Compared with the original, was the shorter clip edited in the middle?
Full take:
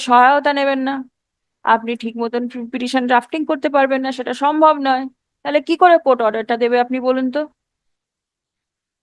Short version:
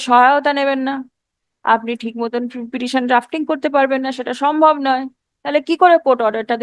no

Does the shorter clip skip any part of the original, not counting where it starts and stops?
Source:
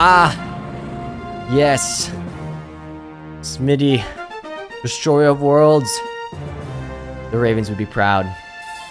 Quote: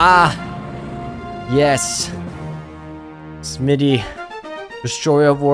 no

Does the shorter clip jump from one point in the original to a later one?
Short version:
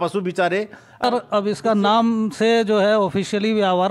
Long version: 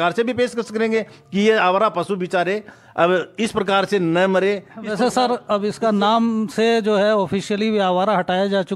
yes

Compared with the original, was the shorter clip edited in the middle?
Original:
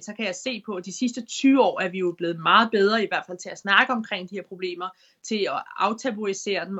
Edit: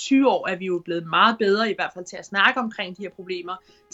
no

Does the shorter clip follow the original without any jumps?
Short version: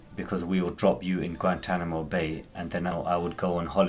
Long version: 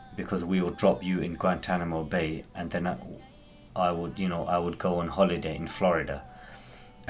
no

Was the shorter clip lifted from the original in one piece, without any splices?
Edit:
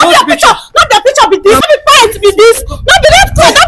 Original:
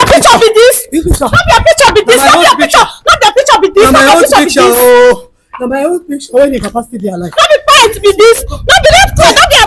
no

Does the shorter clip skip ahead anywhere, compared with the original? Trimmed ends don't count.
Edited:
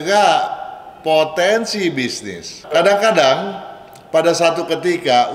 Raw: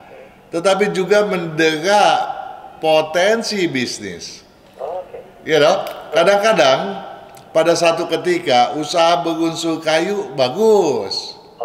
yes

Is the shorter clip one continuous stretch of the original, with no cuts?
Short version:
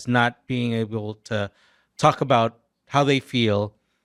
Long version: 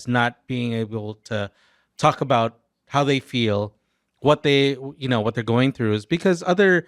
yes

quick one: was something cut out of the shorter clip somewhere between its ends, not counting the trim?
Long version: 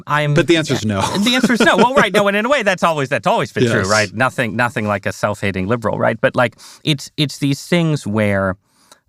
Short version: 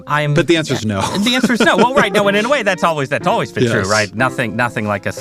no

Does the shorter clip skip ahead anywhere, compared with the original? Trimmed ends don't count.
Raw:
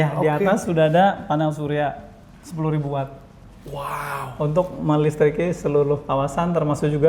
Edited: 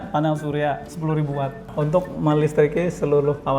yes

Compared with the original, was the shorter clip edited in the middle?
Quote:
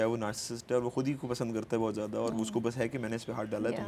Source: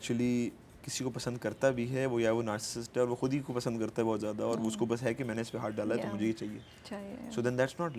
no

